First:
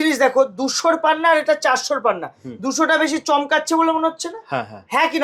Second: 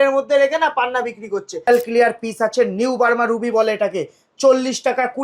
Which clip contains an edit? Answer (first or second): second